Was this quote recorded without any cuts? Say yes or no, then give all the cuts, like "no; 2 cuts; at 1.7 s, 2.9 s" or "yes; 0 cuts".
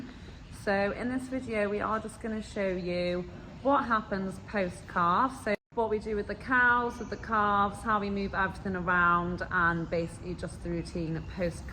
no; 1 cut; at 5.6 s